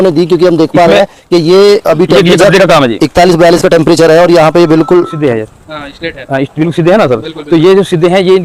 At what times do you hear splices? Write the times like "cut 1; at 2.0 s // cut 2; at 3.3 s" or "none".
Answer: cut 1; at 5.1 s